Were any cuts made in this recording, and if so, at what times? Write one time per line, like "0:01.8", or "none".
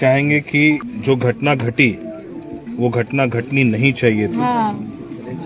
0:00.9